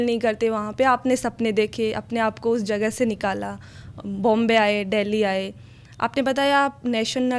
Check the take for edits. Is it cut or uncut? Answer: uncut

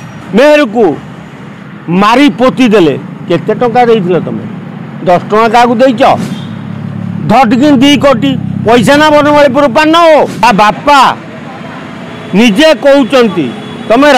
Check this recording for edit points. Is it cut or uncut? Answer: cut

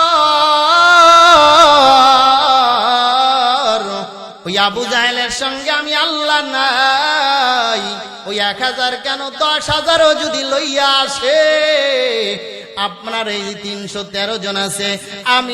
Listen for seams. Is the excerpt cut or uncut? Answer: cut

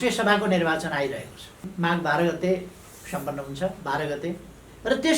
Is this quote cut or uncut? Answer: cut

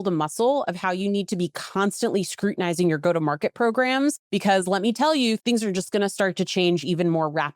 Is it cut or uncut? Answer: cut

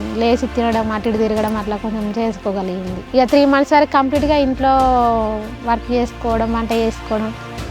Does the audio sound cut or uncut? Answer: cut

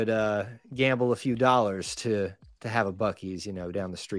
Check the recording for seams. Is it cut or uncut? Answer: uncut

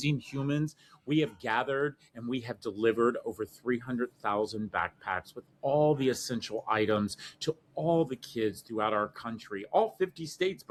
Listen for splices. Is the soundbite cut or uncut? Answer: uncut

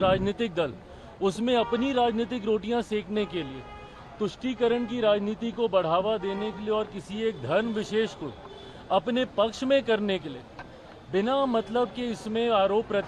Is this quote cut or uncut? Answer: uncut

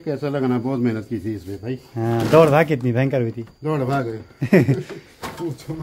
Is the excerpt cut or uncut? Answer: uncut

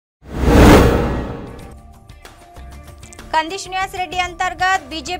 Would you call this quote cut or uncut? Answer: cut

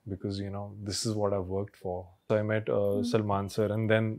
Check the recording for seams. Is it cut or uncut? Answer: cut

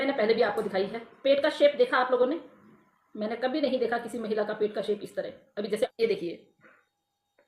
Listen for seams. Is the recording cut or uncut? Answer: cut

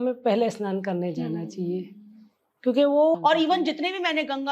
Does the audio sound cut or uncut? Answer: cut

